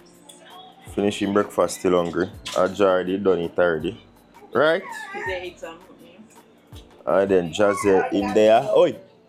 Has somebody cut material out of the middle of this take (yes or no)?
no